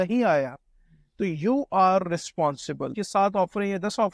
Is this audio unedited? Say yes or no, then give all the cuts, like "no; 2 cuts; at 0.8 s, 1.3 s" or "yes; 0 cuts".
no; 1 cut; at 3.0 s